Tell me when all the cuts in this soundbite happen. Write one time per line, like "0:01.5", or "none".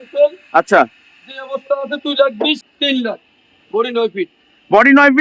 0:02.6